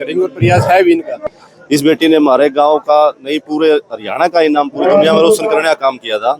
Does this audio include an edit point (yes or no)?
yes